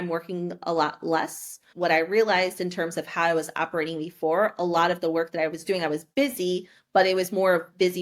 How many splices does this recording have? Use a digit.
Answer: 1